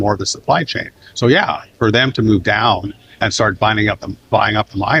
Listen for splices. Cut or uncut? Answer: uncut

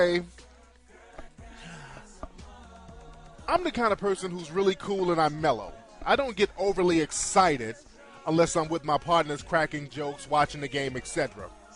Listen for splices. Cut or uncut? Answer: cut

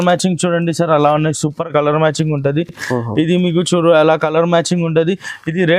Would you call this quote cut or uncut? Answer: uncut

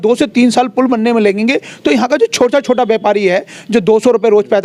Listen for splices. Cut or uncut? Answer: uncut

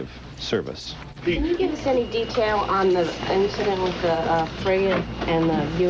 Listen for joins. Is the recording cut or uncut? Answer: uncut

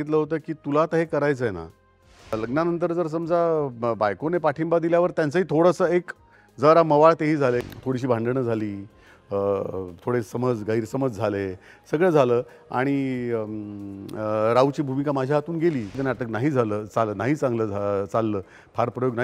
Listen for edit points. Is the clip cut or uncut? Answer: cut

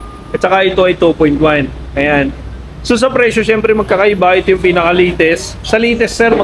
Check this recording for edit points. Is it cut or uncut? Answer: uncut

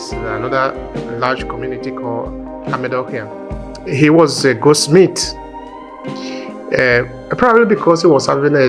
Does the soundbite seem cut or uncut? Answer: cut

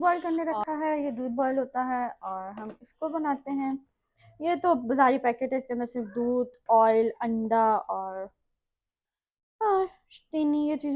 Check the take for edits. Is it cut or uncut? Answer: uncut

